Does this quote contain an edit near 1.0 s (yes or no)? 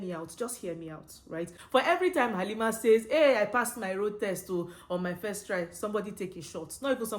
no